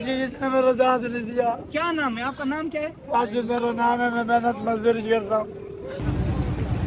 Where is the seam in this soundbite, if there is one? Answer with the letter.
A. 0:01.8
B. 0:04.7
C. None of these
C